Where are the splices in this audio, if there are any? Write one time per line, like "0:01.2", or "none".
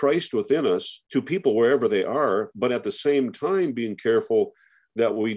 0:01.0

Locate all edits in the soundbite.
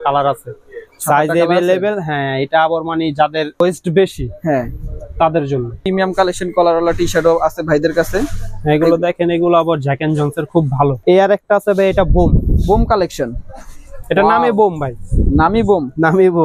0:03.6
0:05.8
0:11.0

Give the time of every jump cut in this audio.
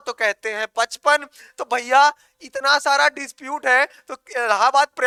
none

